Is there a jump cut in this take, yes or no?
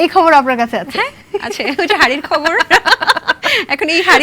no